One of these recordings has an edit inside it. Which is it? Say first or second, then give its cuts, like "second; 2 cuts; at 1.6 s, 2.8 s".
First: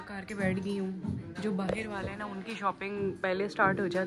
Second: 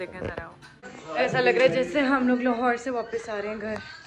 second; 1 cut; at 1.0 s